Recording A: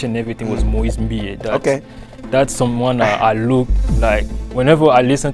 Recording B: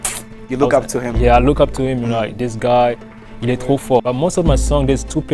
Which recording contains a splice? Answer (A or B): B